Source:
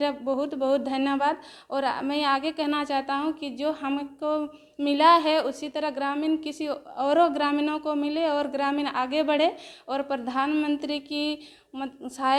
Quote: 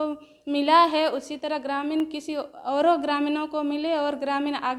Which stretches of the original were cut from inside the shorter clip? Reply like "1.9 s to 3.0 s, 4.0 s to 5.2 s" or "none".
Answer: none